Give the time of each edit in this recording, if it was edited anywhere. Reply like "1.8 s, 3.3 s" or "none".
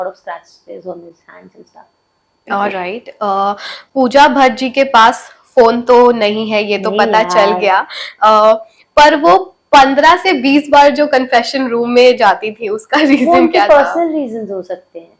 none